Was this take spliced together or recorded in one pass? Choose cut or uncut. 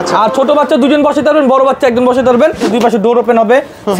cut